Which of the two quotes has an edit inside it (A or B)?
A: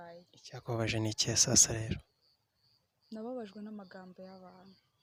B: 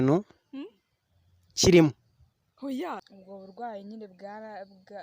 B